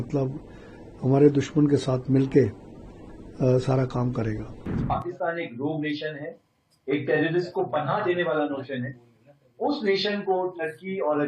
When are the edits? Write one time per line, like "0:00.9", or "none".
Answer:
0:04.8